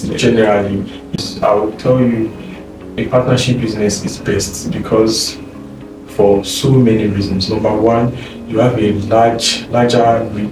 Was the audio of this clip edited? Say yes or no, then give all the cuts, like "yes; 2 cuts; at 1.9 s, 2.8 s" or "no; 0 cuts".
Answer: yes; 1 cut; at 1.2 s